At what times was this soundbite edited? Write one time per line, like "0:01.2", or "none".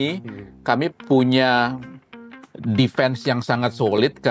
none